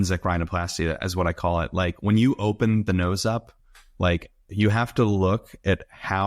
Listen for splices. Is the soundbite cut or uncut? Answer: uncut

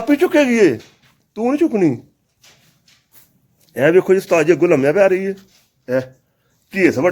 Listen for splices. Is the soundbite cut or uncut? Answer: uncut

